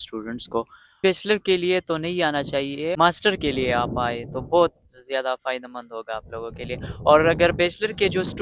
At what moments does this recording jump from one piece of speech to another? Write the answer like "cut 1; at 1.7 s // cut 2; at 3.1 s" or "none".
cut 1; at 1.0 s // cut 2; at 2.9 s